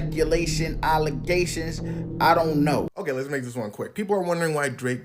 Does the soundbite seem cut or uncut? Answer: cut